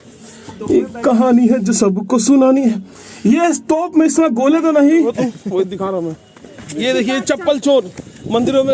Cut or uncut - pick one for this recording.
cut